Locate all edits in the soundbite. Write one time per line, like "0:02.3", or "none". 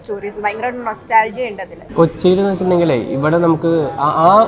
0:01.8